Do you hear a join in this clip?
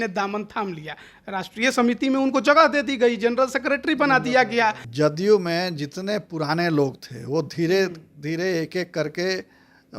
yes; 1 cut; at 4.8 s

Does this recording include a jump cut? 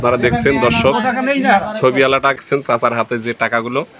yes; 1 cut; at 2.4 s

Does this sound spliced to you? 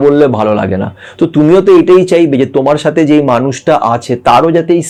no; 0 cuts

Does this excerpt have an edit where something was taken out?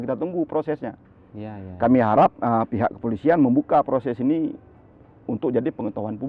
no; 0 cuts

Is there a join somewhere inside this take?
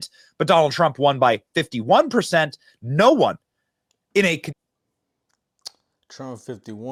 no; 0 cuts

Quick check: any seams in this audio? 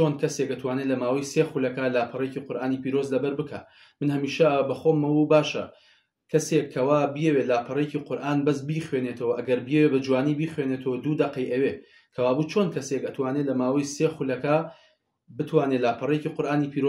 no; 0 cuts

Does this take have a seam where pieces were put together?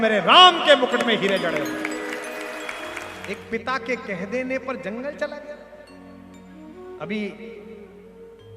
yes; 1 cut; at 3.2 s

